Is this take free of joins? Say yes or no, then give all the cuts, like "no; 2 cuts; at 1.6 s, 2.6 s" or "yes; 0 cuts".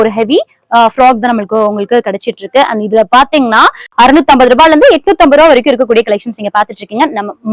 no; 1 cut; at 3.8 s